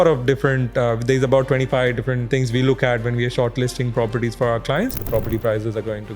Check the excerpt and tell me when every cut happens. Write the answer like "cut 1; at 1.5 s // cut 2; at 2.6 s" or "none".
cut 1; at 2.2 s // cut 2; at 5.0 s